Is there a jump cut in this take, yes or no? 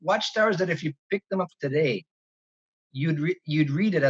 no